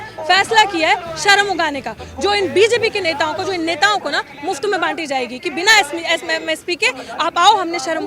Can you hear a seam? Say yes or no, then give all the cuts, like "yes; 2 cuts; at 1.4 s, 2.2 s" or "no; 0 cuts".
no; 0 cuts